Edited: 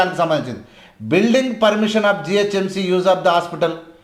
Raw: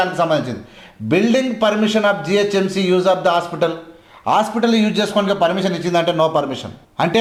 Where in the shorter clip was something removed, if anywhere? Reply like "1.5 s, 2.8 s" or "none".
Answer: none